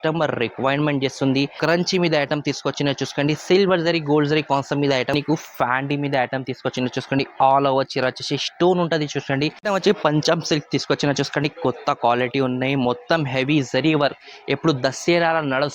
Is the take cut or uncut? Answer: cut